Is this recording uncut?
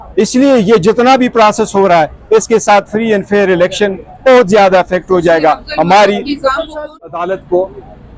no; 1 cut; at 6.8 s

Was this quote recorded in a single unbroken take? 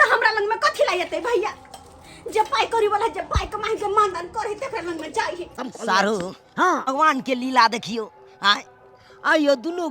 no; 2 cuts; at 5.7 s, 6.9 s

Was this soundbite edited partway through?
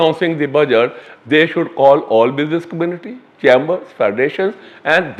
no; 0 cuts

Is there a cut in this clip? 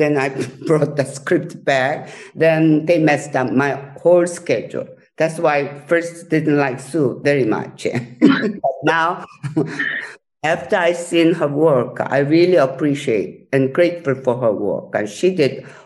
no; 0 cuts

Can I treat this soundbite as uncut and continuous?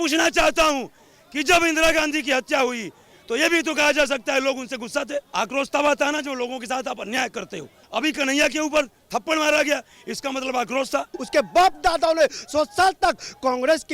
no; 3 cuts; at 5.3 s, 7.9 s, 11.2 s

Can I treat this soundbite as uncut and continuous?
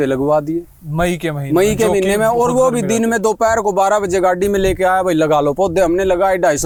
yes; 0 cuts

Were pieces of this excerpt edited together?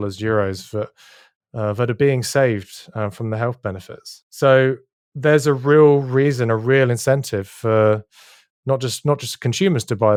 no; 0 cuts

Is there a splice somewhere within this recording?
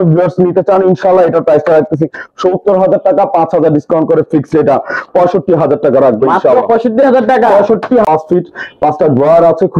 yes; 1 cut; at 8.0 s

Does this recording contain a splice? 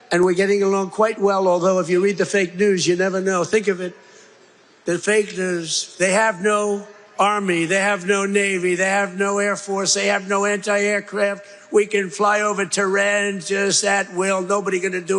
no; 0 cuts

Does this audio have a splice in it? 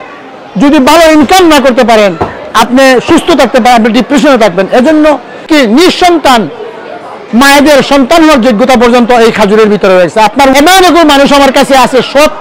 yes; 2 cuts; at 5.5 s, 10.5 s

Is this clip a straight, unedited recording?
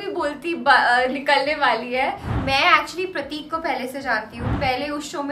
no; 2 cuts; at 2.3 s, 4.5 s

